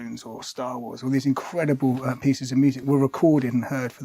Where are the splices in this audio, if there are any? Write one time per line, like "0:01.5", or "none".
0:02.8